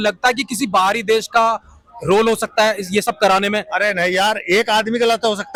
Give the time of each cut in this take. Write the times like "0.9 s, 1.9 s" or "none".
none